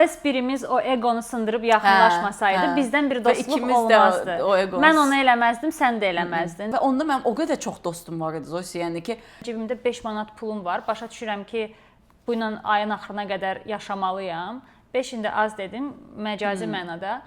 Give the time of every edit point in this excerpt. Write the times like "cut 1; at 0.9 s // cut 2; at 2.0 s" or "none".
cut 1; at 6.7 s // cut 2; at 9.4 s

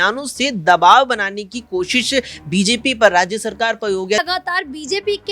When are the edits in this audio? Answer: cut 1; at 4.2 s

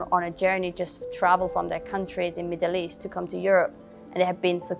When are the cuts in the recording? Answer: none

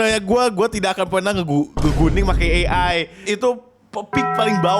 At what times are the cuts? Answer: cut 1; at 3.2 s

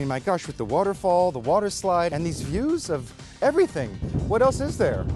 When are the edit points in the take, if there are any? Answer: cut 1; at 2.1 s // cut 2; at 4.0 s

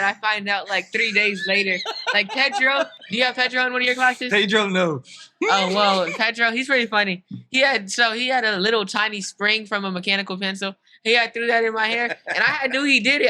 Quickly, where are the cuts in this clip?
cut 1; at 3.0 s

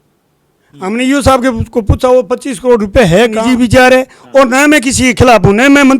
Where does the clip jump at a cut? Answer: cut 1; at 3.4 s

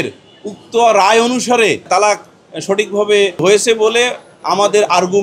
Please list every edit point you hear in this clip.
cut 1; at 1.9 s // cut 2; at 3.4 s

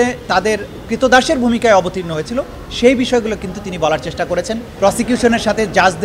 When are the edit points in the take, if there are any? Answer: cut 1; at 4.7 s

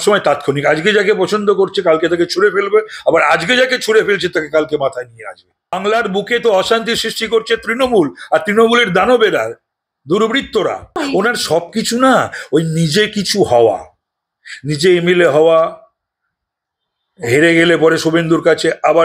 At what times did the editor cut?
cut 1; at 5.8 s // cut 2; at 11.0 s

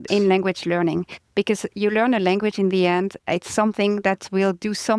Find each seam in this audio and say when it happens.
none

